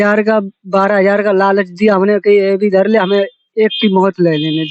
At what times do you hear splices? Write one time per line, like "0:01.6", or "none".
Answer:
none